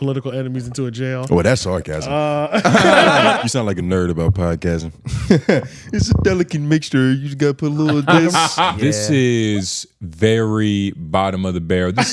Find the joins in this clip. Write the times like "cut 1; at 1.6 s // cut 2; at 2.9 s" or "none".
cut 1; at 3.4 s // cut 2; at 8.8 s